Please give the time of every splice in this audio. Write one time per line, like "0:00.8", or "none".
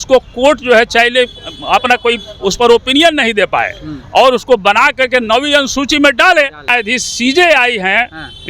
0:06.7